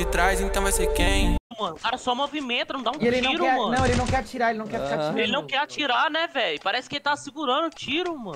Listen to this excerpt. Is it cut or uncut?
cut